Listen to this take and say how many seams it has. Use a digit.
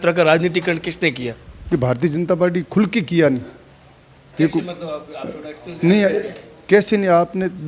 0